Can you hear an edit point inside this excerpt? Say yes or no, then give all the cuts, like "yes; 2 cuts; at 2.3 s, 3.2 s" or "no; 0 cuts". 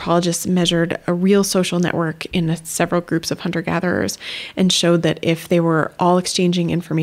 yes; 1 cut; at 2.2 s